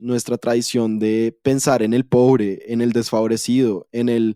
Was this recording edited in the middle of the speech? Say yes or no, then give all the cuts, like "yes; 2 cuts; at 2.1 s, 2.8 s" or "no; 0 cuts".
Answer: no; 0 cuts